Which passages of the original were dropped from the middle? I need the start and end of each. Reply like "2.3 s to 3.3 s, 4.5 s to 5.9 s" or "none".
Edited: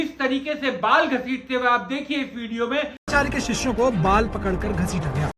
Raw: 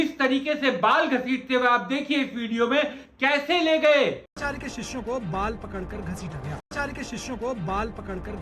3.0 s to 4.3 s